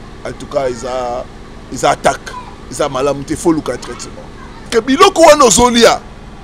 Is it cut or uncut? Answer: cut